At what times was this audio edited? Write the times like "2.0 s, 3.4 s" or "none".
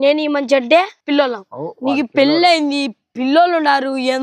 1.0 s